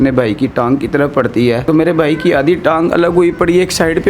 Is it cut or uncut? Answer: cut